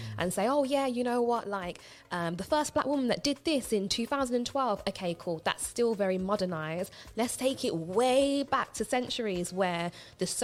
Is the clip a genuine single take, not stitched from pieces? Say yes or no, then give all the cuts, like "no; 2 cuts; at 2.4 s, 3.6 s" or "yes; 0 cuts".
yes; 0 cuts